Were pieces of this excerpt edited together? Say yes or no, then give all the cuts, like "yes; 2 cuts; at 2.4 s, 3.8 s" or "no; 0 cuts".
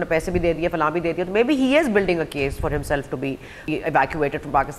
yes; 1 cut; at 3.6 s